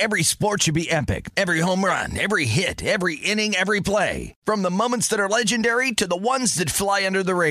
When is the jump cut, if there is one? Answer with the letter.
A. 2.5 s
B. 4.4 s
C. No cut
C